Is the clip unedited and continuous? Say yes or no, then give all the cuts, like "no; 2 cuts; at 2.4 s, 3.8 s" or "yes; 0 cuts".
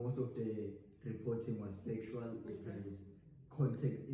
yes; 0 cuts